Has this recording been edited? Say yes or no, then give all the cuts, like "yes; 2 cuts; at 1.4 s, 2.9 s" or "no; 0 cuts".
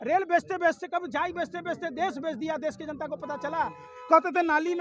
yes; 1 cut; at 3.8 s